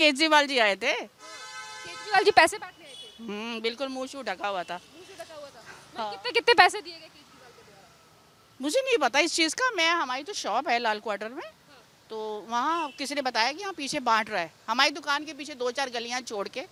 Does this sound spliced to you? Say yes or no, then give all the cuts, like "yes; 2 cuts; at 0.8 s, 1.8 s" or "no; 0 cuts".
no; 0 cuts